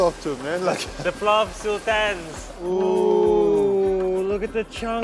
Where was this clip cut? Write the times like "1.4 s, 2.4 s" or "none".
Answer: 2.5 s